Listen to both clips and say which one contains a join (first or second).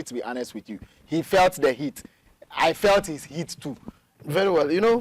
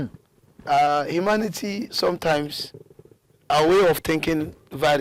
first